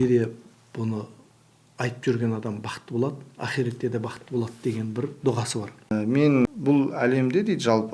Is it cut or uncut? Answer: cut